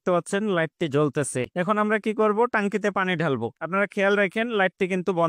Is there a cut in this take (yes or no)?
yes